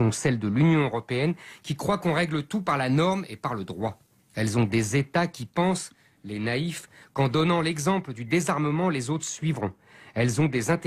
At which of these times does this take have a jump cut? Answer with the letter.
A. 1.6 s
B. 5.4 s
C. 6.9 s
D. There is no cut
B